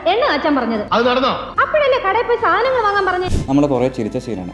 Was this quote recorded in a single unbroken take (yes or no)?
yes